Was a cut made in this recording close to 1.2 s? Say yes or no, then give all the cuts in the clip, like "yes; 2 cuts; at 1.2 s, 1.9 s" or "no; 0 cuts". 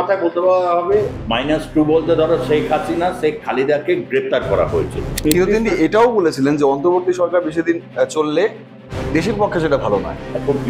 yes; 2 cuts; at 1.2 s, 5.2 s